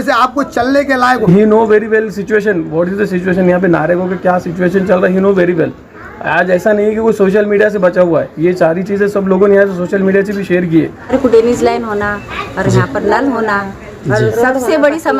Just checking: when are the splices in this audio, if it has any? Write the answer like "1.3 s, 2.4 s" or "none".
1.3 s, 11.0 s